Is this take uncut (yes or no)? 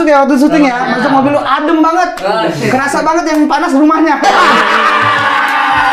yes